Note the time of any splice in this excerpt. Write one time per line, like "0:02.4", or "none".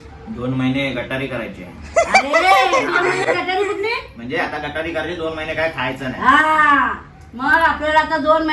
none